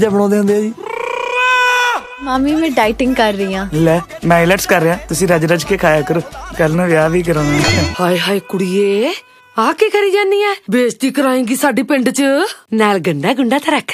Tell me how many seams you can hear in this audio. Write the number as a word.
two